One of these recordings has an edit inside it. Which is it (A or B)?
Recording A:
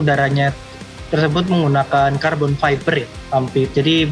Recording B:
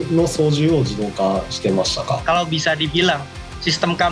B